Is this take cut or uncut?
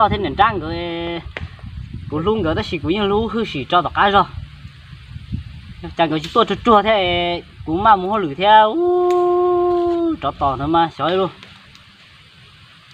uncut